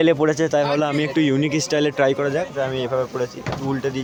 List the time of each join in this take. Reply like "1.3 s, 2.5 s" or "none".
none